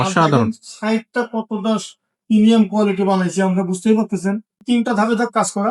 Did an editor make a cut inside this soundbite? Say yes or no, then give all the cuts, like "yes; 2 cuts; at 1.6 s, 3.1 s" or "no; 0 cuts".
yes; 1 cut; at 4.6 s